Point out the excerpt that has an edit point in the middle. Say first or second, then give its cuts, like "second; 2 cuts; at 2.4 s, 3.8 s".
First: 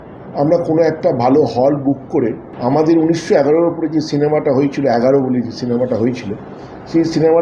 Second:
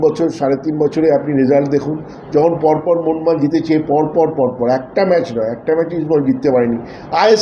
first; 1 cut; at 2.5 s